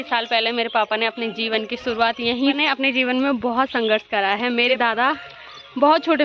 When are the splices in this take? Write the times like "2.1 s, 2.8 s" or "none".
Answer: 2.6 s, 4.8 s